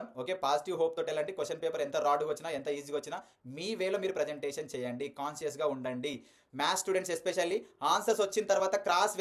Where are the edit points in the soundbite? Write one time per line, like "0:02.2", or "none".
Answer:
none